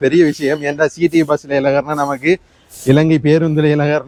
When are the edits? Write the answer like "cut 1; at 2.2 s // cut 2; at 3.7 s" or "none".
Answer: none